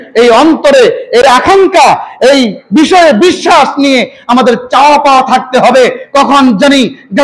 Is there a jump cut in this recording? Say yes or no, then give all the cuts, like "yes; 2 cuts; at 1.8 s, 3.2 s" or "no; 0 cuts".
yes; 1 cut; at 1.2 s